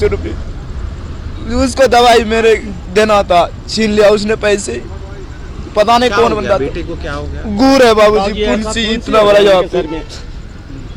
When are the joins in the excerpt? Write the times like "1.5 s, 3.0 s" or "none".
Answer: none